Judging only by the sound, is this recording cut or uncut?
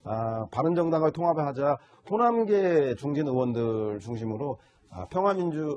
uncut